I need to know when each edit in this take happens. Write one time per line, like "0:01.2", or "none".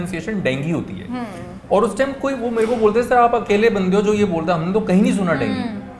none